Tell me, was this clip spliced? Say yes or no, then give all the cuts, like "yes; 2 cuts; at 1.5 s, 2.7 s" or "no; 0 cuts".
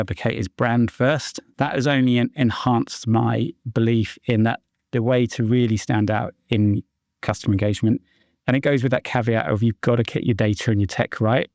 yes; 1 cut; at 1.4 s